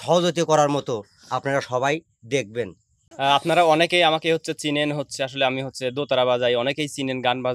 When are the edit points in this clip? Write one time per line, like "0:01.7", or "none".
0:03.0